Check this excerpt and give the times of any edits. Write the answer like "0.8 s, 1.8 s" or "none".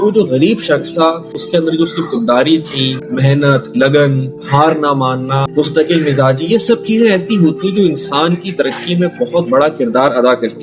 1.3 s, 3.0 s, 5.5 s

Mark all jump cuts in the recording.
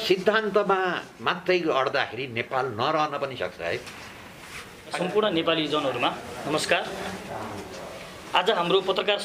4.9 s

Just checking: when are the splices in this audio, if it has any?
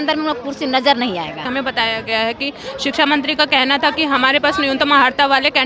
1.5 s

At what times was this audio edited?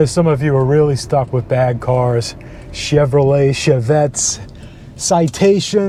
none

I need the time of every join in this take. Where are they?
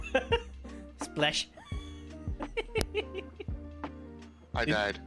none

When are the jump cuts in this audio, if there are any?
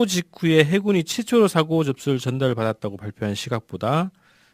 none

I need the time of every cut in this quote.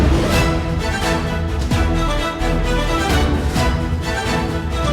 none

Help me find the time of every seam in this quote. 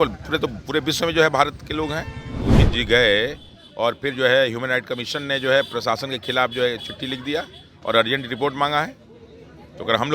2.6 s

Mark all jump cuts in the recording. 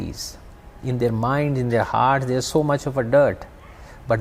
none

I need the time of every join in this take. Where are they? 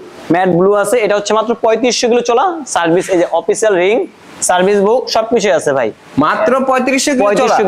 none

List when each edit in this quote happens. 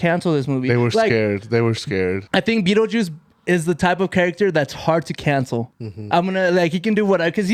none

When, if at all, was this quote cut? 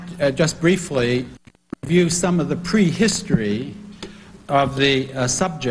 none

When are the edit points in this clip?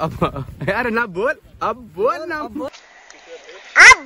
2.7 s

